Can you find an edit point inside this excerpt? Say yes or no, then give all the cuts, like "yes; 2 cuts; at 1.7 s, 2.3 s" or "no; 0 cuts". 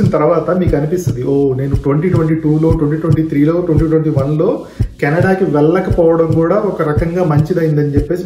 no; 0 cuts